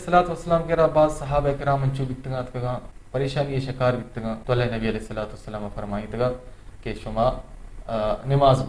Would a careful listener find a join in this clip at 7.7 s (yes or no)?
no